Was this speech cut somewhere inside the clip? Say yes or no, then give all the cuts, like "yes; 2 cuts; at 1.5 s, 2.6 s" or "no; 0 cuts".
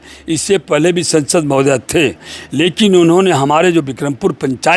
no; 0 cuts